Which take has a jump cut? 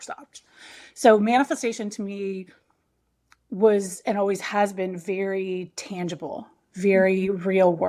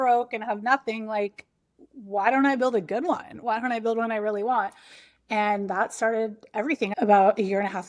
second; 1 cut; at 6.9 s

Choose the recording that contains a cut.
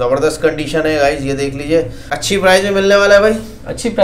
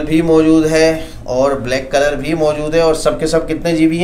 first; 1 cut; at 2.2 s

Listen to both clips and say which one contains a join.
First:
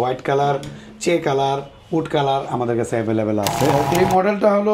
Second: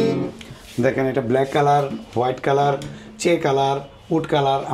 first; 1 cut; at 3.7 s

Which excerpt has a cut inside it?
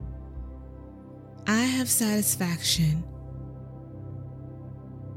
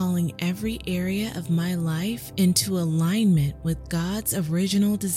first; 2 cuts; at 1.5 s, 3.3 s

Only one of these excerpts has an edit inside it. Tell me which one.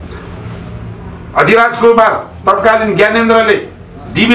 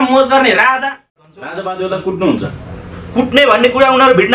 second; 1 cut; at 1.2 s

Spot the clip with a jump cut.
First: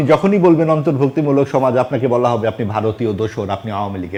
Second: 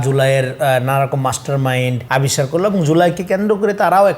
second; 1 cut; at 2.0 s

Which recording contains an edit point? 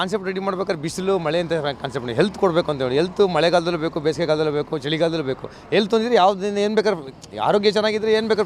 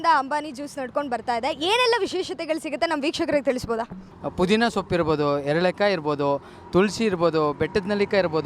second; 1 cut; at 4.0 s

